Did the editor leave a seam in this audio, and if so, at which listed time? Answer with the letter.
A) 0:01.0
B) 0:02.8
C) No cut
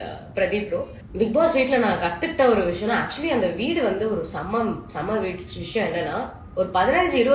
A